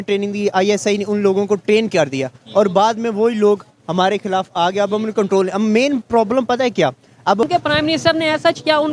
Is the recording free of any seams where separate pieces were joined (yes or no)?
no